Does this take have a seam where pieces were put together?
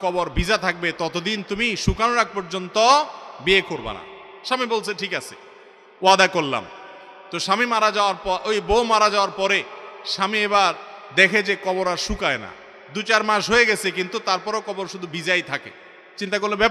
no; 0 cuts

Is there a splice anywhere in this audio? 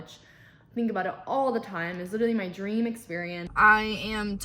yes; 1 cut; at 3.4 s

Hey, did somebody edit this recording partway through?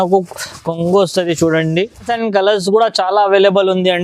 yes; 1 cut; at 2.1 s

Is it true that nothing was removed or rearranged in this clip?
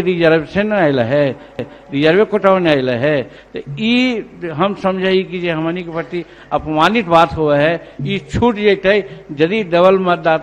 yes; 0 cuts

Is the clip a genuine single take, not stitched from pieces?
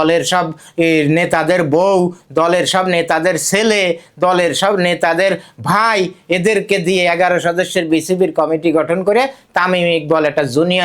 yes; 0 cuts

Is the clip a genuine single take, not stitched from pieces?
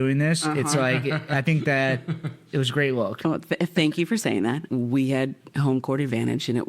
no; 1 cut; at 4.6 s

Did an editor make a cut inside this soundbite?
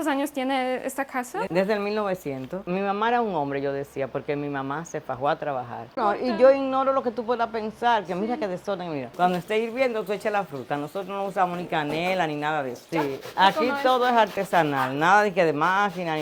yes; 4 cuts; at 2.6 s, 6.0 s, 9.1 s, 13.0 s

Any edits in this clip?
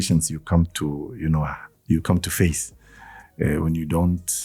no; 0 cuts

